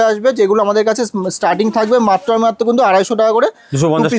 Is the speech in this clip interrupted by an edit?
no; 0 cuts

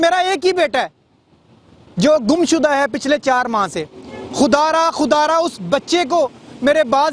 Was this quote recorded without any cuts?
yes; 0 cuts

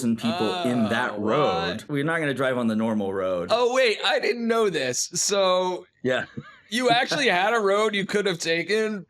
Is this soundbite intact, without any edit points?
no; 2 cuts; at 1.8 s, 3.5 s

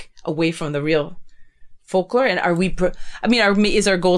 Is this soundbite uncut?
yes; 0 cuts

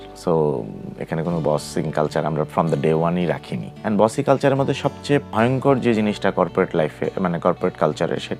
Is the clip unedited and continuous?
yes; 0 cuts

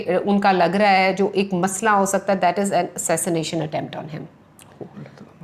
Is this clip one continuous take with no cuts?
yes; 0 cuts

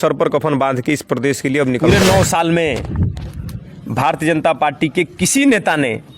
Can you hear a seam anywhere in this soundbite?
yes; 1 cut; at 1.8 s

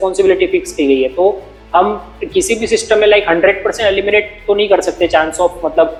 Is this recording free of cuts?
yes; 0 cuts

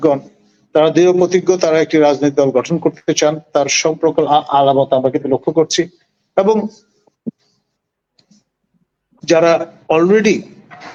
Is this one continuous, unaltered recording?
yes; 0 cuts

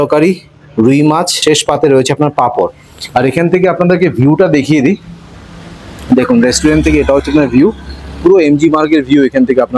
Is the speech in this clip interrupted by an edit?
yes; 2 cuts; at 1.3 s, 2.9 s

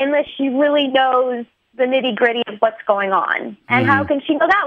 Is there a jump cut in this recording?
no; 0 cuts

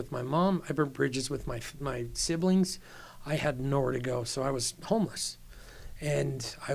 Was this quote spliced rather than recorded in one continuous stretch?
no; 0 cuts

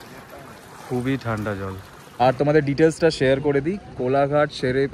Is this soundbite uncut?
no; 1 cut; at 2.0 s

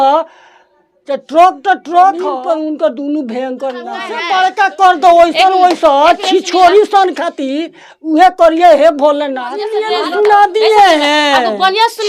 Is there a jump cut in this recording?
yes; 3 cuts; at 2.4 s, 4.2 s, 9.7 s

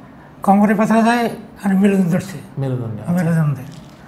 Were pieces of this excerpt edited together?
no; 0 cuts

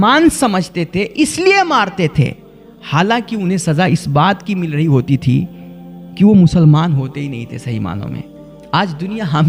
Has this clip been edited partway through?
no; 0 cuts

